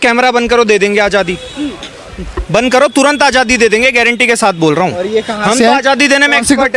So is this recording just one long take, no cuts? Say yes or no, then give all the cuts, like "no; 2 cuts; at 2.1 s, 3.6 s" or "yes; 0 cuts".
yes; 0 cuts